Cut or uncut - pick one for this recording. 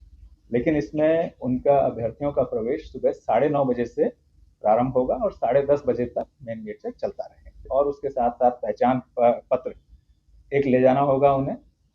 cut